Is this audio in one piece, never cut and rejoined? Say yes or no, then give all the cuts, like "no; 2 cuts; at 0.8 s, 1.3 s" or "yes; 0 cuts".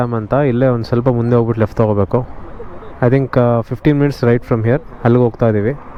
yes; 0 cuts